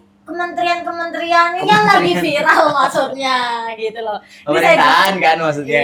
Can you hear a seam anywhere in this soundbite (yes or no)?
no